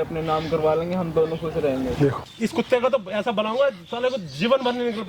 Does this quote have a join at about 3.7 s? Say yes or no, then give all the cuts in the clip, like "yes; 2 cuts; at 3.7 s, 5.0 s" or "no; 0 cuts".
no; 1 cut; at 2.3 s